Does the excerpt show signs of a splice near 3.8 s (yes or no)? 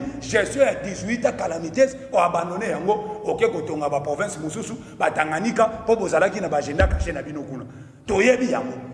no